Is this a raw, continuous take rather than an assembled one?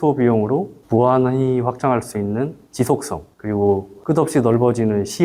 yes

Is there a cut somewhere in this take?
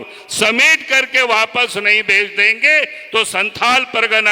no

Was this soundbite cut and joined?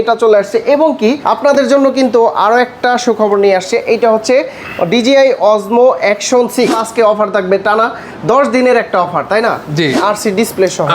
yes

